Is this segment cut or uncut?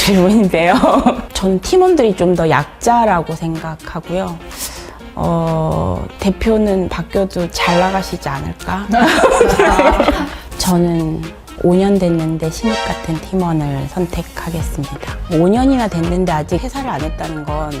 cut